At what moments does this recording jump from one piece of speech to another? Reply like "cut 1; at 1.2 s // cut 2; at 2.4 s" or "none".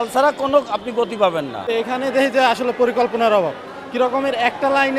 cut 1; at 1.7 s